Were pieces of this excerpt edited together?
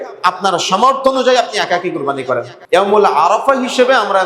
yes; 1 cut; at 2.5 s

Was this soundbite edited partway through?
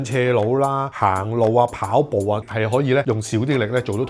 yes; 1 cut; at 2.5 s

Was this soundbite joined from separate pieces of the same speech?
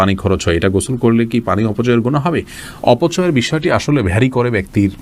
no; 0 cuts

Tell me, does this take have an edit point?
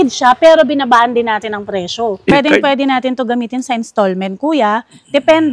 yes; 1 cut; at 2.3 s

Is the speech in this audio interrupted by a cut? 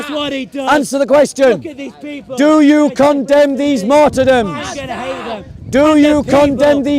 no; 0 cuts

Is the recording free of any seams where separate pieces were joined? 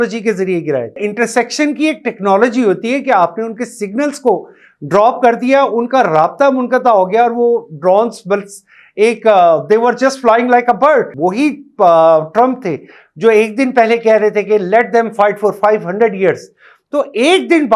no; 2 cuts; at 1.0 s, 11.1 s

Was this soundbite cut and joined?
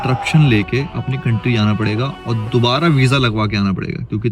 no; 0 cuts

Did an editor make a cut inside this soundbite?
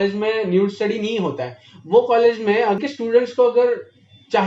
yes; 1 cut; at 2.8 s

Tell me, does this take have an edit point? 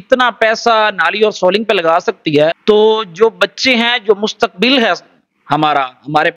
yes; 1 cut; at 2.6 s

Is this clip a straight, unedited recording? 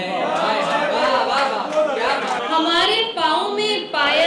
no; 1 cut; at 2.4 s

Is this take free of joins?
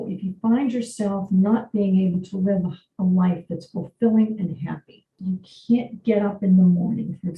no; 1 cut; at 5.1 s

